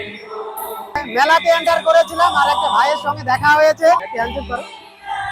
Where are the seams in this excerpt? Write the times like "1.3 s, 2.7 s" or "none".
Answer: 1.1 s, 4.0 s